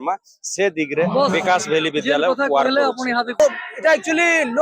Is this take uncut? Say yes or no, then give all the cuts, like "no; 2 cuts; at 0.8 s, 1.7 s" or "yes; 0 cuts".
no; 1 cut; at 3.4 s